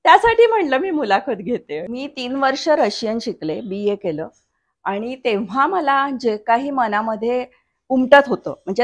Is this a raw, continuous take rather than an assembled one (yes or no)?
no